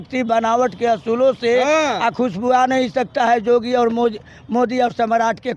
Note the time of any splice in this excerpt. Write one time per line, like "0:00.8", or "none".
none